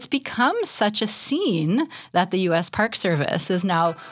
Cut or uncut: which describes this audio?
uncut